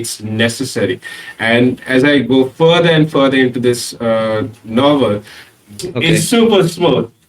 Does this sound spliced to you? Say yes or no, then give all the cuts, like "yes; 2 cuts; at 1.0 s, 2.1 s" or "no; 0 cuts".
yes; 1 cut; at 5.8 s